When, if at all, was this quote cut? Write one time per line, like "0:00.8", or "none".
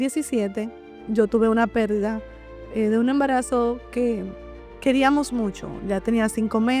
none